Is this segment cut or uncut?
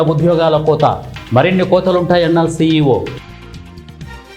uncut